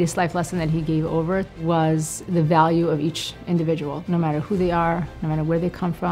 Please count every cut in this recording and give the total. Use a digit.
3